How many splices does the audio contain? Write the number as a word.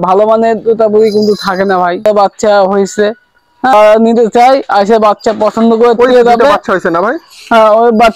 two